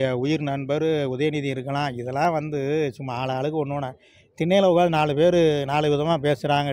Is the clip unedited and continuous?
yes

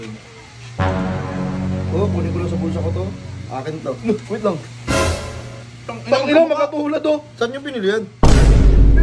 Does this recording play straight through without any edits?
yes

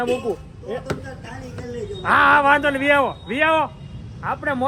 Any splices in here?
no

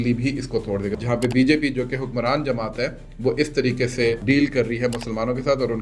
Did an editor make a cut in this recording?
yes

